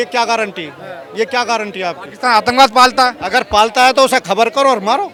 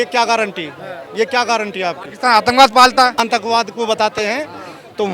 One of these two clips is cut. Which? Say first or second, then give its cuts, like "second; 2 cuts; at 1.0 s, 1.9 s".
second; 1 cut; at 3.2 s